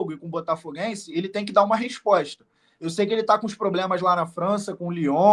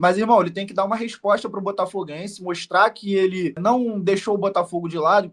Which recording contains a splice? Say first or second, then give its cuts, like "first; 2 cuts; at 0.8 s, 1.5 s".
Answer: second; 1 cut; at 3.6 s